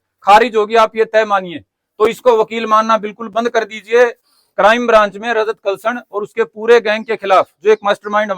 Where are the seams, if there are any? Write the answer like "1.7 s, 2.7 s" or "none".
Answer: 4.3 s